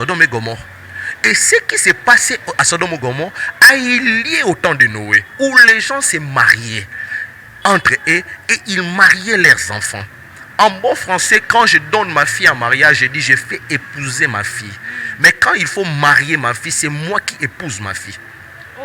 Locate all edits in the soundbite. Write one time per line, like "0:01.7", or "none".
none